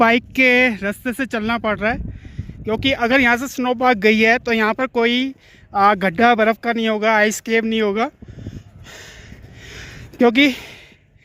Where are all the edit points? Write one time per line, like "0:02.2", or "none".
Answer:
none